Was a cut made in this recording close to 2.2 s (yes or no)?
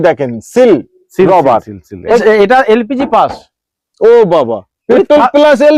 yes